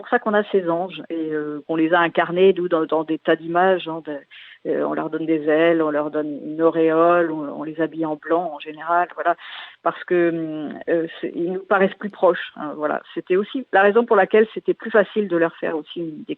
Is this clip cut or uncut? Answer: cut